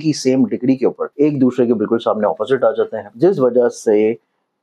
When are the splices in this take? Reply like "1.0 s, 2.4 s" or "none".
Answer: 1.0 s, 3.0 s